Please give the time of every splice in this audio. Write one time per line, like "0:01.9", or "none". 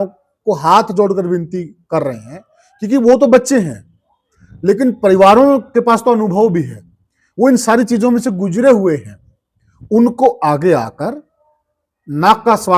none